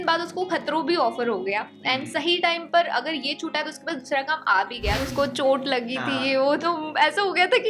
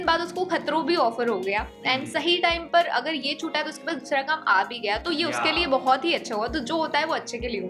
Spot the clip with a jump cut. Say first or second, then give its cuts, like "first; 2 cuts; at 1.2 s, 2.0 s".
first; 1 cut; at 5.0 s